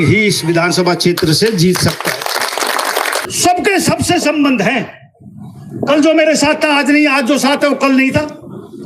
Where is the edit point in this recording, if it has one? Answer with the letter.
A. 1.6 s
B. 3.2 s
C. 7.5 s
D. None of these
B